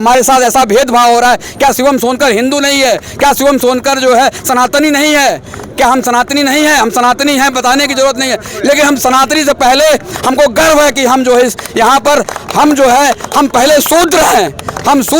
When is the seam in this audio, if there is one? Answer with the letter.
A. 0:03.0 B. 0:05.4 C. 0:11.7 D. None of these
D